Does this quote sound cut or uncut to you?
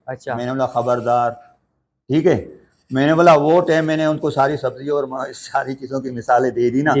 uncut